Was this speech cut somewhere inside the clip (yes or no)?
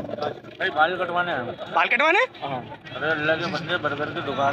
no